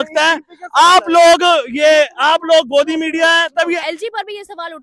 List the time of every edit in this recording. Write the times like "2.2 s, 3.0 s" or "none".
3.8 s